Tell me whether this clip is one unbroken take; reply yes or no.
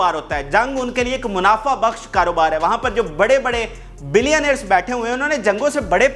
yes